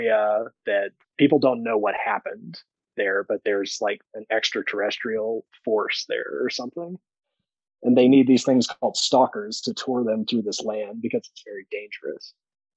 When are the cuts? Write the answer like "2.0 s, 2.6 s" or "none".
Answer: 1.0 s